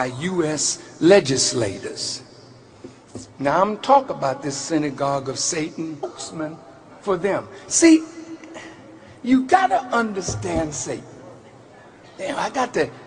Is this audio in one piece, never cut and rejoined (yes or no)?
yes